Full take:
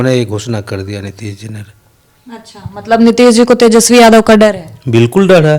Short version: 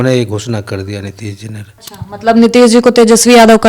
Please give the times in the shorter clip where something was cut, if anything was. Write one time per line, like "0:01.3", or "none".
0:01.9